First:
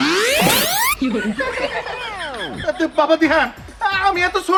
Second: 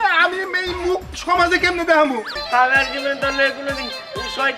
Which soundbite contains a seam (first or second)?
second